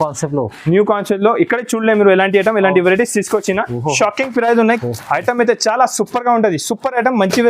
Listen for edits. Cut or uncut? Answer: cut